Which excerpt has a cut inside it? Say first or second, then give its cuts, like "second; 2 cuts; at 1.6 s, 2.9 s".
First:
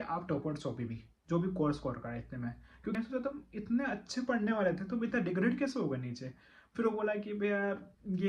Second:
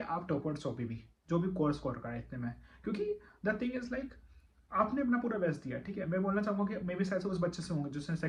first; 1 cut; at 3.0 s